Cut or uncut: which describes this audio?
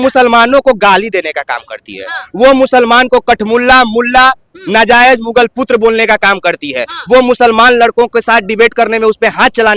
uncut